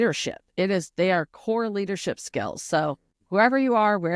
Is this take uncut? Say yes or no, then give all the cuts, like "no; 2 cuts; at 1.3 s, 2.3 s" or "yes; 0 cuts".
no; 1 cut; at 3.1 s